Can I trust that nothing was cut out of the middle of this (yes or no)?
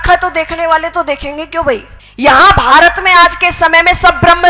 no